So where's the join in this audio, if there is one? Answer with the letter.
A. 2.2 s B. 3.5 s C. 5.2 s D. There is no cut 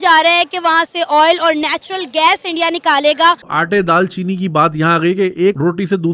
B